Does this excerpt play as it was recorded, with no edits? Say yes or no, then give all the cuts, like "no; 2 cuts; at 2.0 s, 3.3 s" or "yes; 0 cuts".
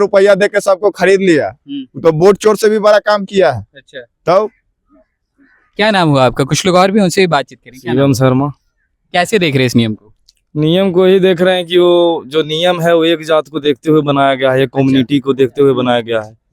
yes; 0 cuts